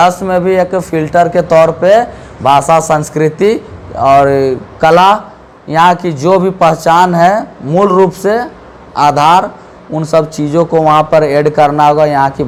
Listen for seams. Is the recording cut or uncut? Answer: uncut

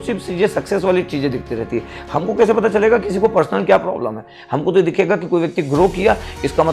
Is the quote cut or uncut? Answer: uncut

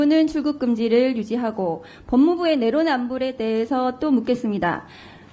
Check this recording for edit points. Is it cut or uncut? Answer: uncut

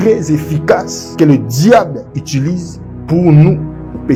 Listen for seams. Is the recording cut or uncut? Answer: uncut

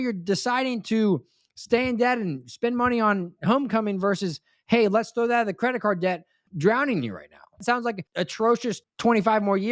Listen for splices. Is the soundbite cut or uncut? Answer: cut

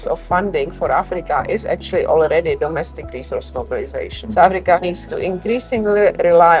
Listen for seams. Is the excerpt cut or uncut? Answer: uncut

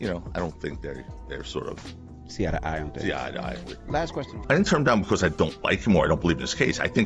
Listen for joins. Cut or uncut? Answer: cut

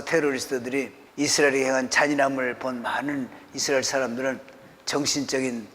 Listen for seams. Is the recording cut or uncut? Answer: cut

